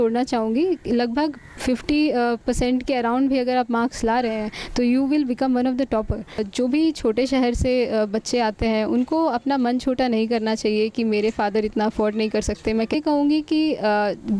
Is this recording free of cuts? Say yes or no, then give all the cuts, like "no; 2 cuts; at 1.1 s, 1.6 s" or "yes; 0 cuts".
no; 2 cuts; at 6.5 s, 12.9 s